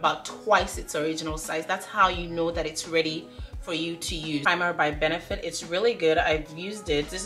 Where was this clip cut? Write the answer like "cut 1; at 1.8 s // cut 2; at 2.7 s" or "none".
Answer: cut 1; at 4.4 s

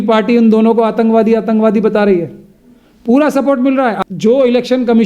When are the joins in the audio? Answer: cut 1; at 4.0 s

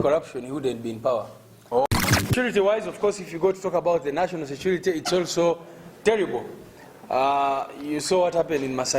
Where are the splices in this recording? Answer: cut 1; at 1.9 s

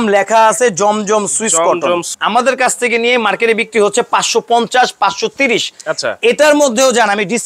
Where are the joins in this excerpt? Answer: cut 1; at 2.1 s

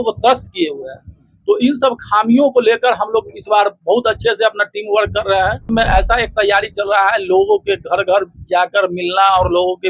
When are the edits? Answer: cut 1; at 5.6 s

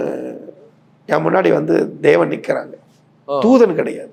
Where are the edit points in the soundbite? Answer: none

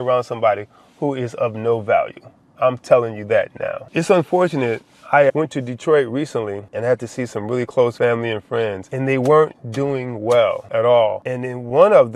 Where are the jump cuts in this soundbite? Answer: none

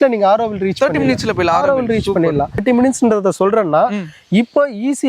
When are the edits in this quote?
cut 1; at 2.6 s

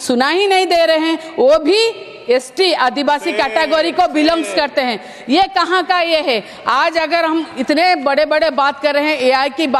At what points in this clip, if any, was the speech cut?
none

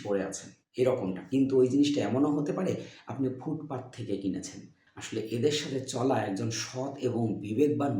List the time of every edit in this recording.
cut 1; at 4.8 s

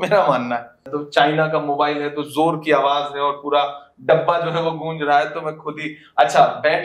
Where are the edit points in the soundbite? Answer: cut 1; at 0.9 s

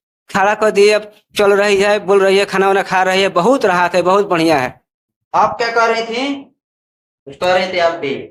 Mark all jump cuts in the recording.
none

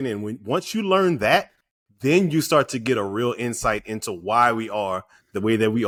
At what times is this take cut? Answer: none

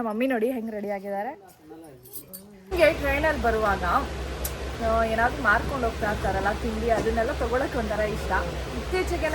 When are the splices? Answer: cut 1; at 2.7 s

